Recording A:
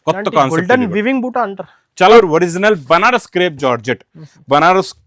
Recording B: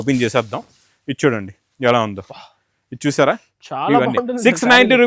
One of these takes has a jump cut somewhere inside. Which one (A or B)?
A